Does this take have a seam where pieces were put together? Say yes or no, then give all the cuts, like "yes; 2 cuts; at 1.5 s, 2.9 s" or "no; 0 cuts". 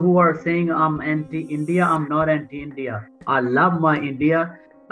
no; 0 cuts